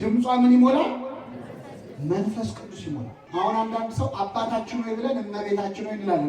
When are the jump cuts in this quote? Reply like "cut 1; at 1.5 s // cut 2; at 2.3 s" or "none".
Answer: cut 1; at 3.2 s